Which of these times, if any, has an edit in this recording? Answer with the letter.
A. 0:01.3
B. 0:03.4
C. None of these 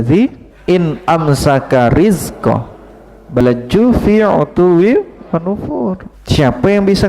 B